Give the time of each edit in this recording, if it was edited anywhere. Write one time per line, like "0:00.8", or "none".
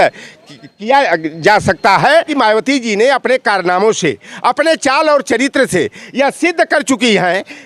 0:02.3